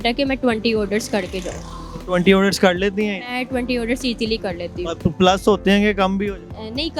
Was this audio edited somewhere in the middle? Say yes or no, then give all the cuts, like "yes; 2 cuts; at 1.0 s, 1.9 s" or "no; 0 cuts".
no; 0 cuts